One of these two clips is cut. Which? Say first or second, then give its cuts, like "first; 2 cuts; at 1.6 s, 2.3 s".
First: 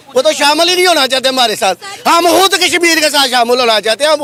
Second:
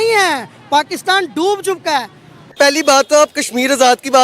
second; 1 cut; at 2.5 s